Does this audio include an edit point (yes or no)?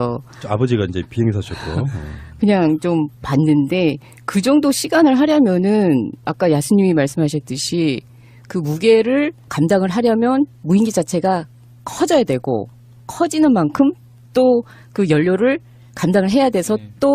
no